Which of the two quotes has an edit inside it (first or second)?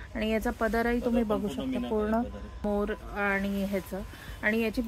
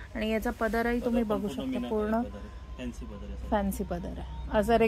first